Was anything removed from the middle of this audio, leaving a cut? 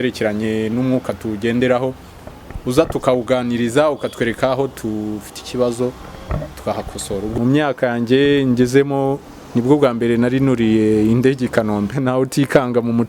yes; 2 cuts; at 7.3 s, 11.9 s

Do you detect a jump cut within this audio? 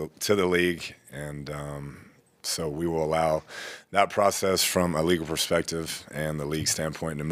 no; 0 cuts

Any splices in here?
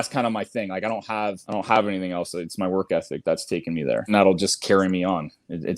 yes; 2 cuts; at 1.4 s, 4.1 s

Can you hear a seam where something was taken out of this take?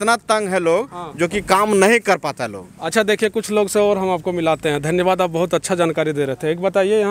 no; 0 cuts

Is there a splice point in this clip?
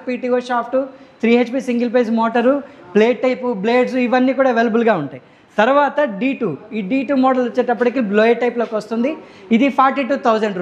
no; 0 cuts

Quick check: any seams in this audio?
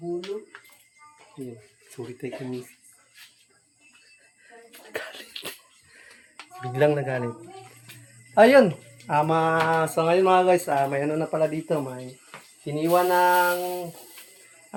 no; 0 cuts

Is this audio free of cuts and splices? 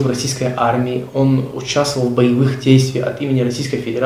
yes; 0 cuts

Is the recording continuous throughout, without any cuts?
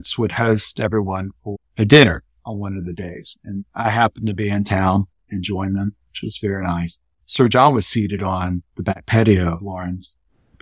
no; 2 cuts; at 5.3 s, 7.2 s

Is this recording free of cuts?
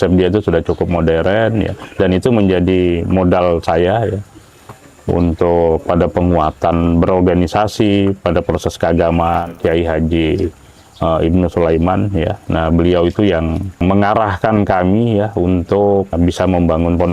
no; 3 cuts; at 9.5 s, 13.8 s, 16.1 s

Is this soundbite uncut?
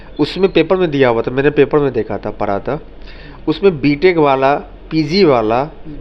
yes; 0 cuts

